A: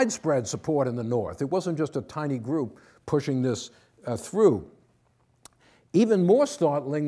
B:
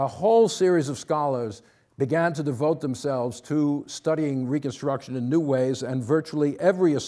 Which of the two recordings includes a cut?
B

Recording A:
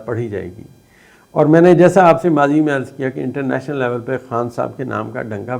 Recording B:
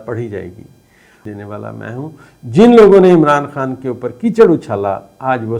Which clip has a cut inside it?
B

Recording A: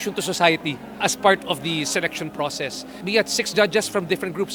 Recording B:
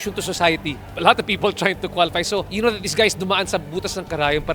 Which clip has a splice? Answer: B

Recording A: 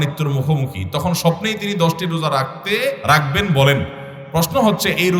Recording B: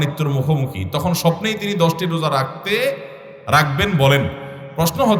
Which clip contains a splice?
A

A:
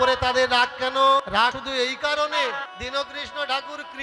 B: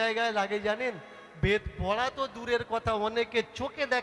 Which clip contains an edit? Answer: A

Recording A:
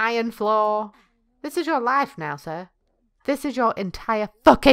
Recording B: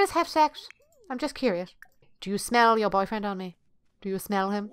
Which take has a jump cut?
B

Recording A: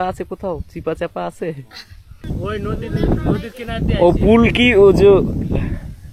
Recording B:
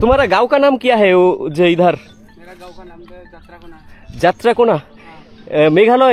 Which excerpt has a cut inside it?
A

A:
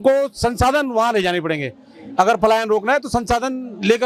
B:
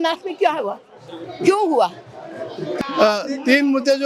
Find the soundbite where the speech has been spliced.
B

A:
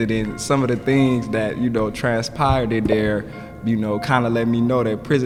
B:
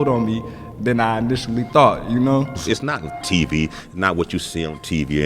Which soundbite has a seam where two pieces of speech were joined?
B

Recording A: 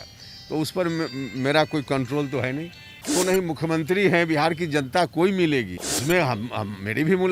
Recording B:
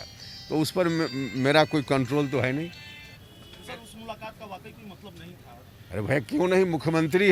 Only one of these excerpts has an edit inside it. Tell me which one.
A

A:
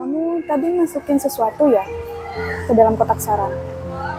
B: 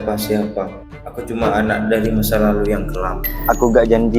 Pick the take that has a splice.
B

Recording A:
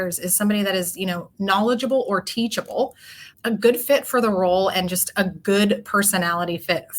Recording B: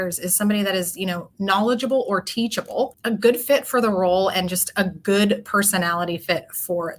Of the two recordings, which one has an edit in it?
B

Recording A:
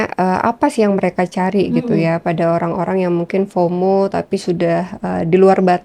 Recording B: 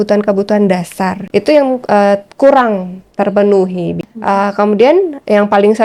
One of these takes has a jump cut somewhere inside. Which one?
B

